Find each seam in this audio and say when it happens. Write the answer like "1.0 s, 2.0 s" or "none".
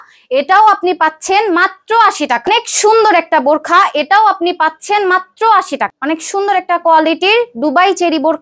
2.5 s, 5.9 s